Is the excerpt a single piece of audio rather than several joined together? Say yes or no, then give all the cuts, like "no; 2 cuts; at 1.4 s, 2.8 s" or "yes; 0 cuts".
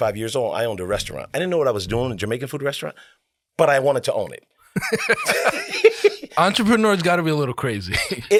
yes; 0 cuts